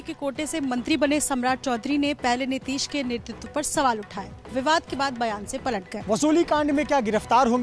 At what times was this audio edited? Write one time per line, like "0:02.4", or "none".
0:05.9